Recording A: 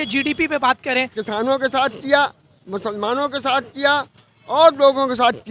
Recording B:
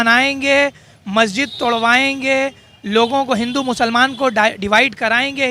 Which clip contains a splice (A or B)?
A